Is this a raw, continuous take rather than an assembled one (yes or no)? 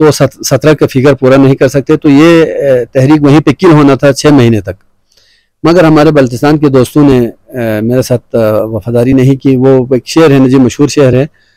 yes